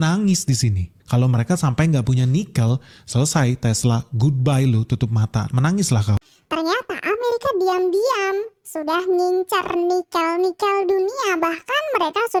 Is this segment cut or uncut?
uncut